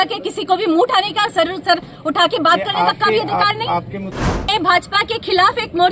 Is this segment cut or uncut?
cut